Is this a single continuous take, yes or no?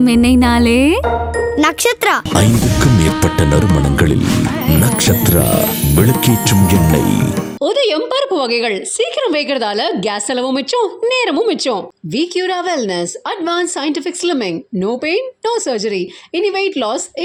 yes